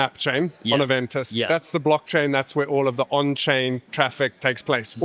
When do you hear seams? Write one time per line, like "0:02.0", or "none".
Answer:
none